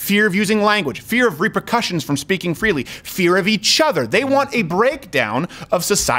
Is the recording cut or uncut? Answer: uncut